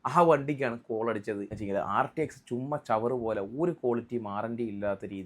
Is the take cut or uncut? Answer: cut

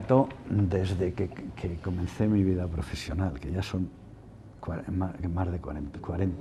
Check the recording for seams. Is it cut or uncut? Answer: uncut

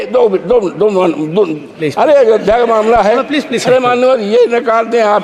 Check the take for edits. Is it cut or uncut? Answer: uncut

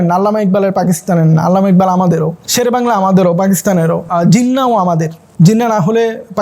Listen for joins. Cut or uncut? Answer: cut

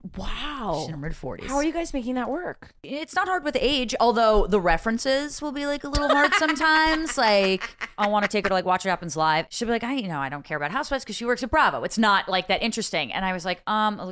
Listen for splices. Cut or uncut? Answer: cut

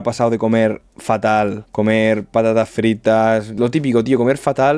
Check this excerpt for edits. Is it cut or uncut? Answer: uncut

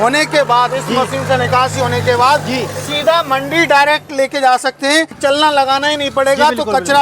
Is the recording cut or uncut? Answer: cut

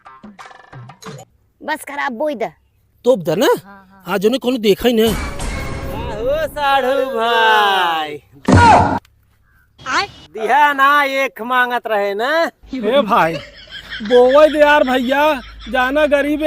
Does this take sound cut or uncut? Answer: cut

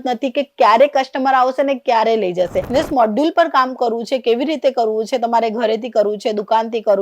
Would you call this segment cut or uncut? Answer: cut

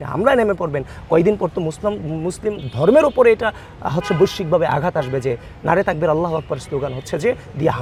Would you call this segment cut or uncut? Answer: uncut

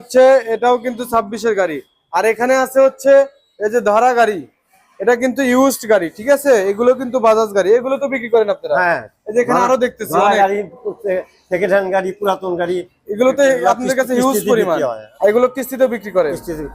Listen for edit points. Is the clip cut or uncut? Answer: cut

